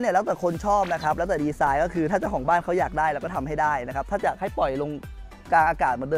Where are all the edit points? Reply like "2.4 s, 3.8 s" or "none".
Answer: none